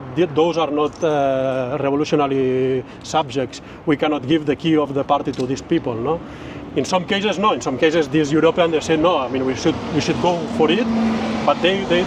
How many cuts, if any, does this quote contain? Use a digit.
0